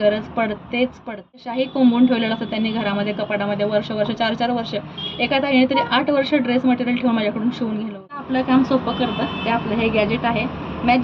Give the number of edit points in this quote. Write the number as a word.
two